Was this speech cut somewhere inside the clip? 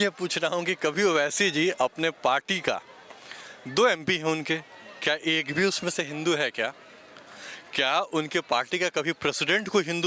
no; 0 cuts

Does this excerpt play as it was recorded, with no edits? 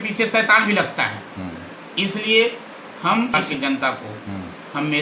no; 1 cut; at 3.3 s

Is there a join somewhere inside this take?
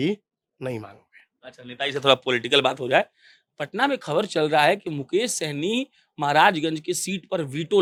no; 0 cuts

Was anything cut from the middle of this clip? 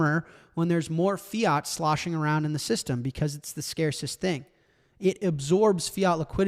no; 0 cuts

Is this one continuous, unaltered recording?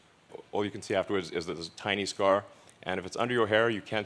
yes; 0 cuts

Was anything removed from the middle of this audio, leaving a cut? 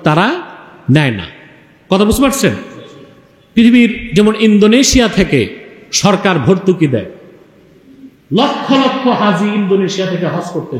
no; 0 cuts

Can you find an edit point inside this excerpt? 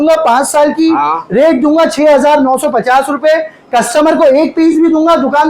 no; 0 cuts

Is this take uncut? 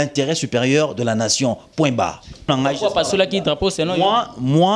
no; 1 cut; at 2.5 s

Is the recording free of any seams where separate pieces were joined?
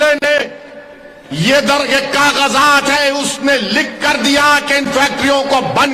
yes; 0 cuts

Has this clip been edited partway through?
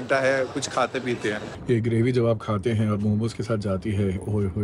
yes; 1 cut; at 1.5 s

